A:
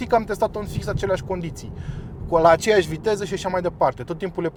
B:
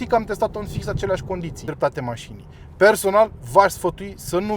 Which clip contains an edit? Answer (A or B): B